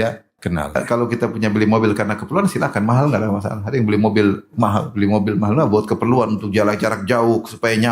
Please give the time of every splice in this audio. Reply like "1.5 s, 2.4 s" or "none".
1.0 s